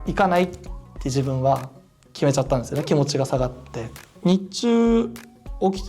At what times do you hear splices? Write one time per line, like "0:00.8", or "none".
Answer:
0:04.1